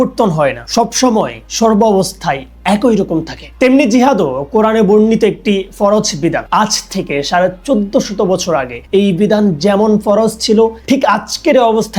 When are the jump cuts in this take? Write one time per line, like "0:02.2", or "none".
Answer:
none